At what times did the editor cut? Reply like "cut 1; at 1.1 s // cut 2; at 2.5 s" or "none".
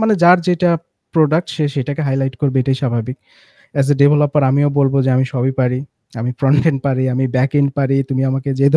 none